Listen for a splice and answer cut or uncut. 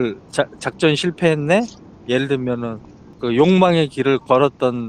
uncut